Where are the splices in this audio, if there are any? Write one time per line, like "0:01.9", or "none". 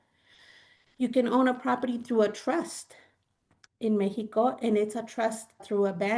none